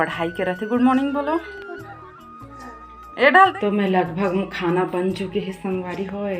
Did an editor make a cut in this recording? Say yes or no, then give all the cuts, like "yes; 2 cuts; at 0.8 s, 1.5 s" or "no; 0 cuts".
yes; 1 cut; at 3.5 s